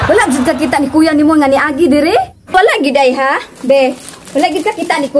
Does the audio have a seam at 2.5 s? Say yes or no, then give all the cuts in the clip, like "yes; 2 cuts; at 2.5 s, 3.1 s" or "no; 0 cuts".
yes; 1 cut; at 2.5 s